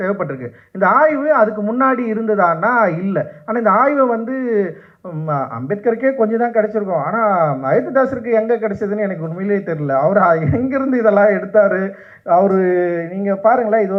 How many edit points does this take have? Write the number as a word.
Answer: zero